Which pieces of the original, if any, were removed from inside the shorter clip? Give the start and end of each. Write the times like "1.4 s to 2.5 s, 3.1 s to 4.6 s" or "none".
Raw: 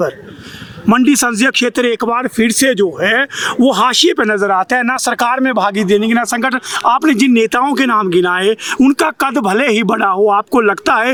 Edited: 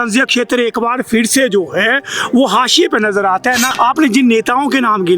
4.9 s to 6.7 s